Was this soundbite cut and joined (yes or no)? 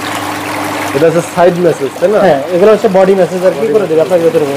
no